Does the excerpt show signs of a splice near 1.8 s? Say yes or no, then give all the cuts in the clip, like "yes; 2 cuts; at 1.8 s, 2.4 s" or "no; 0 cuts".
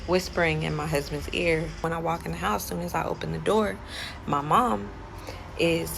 yes; 1 cut; at 1.8 s